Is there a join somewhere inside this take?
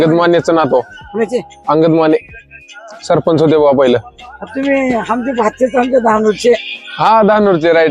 no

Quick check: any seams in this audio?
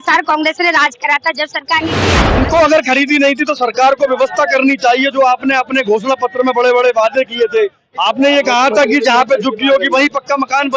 yes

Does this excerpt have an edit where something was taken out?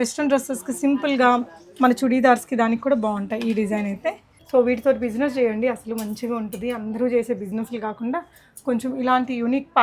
yes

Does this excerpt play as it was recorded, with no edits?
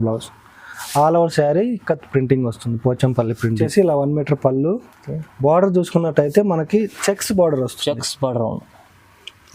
no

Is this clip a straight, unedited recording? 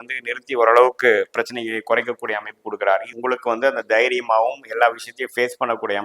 no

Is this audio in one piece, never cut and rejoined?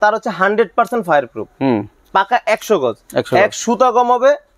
yes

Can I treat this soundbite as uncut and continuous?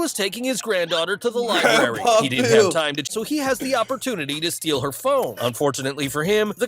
no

